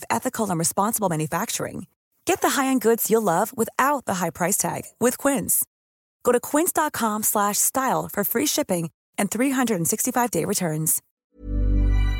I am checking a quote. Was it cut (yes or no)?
yes